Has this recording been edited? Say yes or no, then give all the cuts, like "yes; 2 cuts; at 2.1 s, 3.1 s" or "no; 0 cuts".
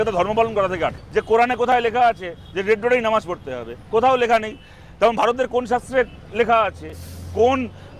no; 0 cuts